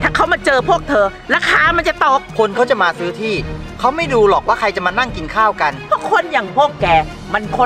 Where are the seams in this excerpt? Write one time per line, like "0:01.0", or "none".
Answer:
0:02.3
0:05.8

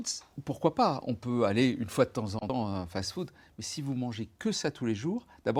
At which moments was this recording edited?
0:02.5

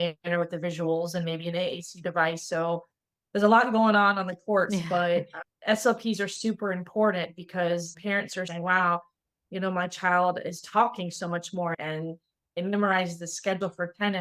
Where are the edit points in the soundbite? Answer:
0:08.5

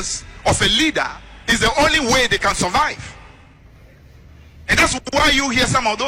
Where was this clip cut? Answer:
none

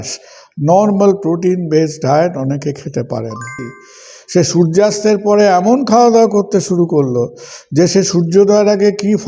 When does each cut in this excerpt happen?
0:03.6

